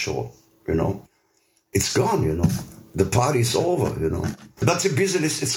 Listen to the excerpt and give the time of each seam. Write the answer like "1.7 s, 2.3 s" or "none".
4.6 s